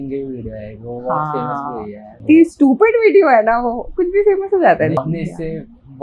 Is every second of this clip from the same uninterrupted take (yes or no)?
no